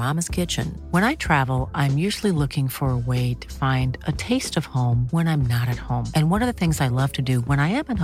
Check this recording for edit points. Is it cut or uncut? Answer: uncut